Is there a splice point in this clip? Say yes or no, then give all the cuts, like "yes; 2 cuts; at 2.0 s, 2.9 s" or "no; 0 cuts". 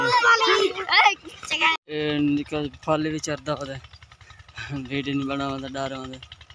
yes; 1 cut; at 1.8 s